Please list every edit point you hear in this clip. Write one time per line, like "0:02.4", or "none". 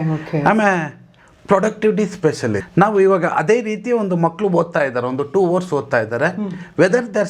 0:02.6